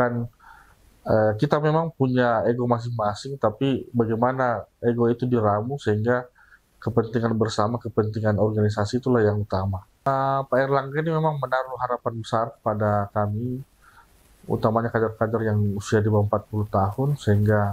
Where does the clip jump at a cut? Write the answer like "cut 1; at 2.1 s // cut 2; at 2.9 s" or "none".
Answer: cut 1; at 9.9 s